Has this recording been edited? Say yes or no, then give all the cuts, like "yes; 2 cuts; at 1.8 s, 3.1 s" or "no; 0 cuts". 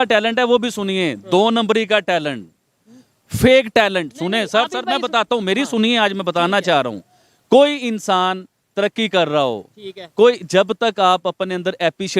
no; 0 cuts